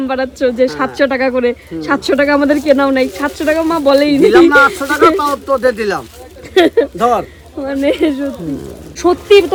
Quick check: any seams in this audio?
no; 0 cuts

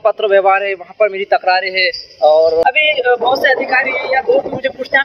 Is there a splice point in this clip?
yes; 1 cut; at 2.6 s

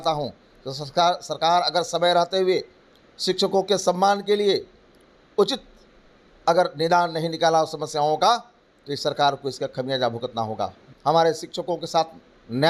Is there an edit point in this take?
yes; 1 cut; at 10.9 s

